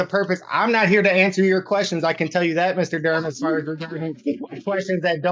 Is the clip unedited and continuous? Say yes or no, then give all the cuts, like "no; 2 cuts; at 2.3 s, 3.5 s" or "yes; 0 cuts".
yes; 0 cuts